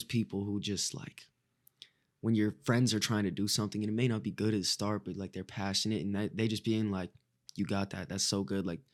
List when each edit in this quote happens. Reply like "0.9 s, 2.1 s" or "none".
none